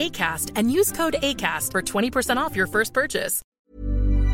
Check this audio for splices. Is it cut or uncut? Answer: cut